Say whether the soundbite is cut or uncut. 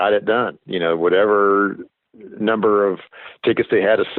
uncut